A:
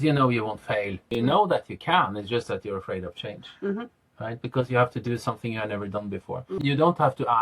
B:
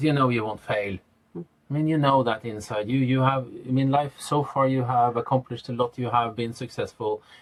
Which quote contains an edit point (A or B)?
A